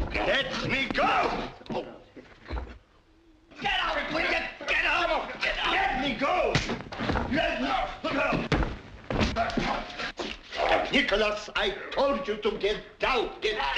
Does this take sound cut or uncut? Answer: uncut